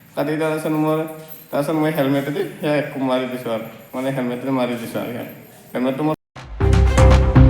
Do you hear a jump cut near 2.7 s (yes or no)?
no